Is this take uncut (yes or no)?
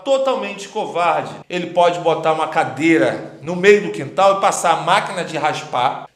no